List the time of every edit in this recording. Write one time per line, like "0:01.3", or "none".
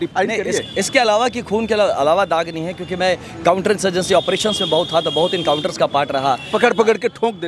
none